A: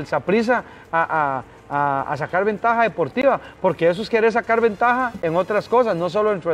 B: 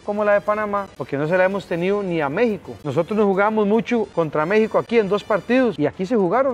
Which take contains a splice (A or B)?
B